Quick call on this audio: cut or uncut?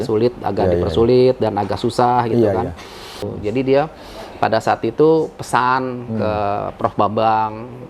cut